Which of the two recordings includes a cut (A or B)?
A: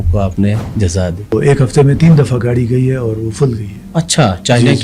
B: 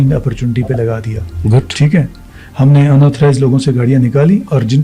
A